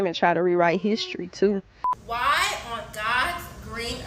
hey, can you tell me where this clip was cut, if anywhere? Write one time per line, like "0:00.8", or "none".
0:01.8